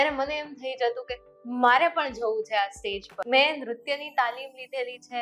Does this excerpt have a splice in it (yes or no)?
yes